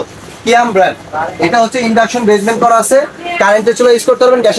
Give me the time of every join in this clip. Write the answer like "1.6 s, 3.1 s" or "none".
none